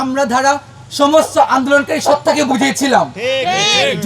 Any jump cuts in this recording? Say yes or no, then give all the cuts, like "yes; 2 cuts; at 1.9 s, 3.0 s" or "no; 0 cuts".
no; 0 cuts